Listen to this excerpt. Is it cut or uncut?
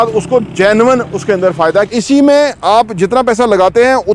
cut